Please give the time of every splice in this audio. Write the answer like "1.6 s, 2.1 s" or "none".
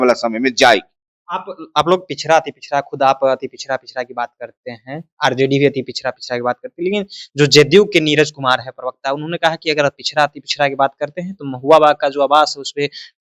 none